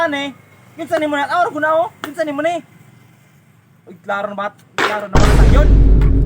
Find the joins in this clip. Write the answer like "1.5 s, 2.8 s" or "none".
5.1 s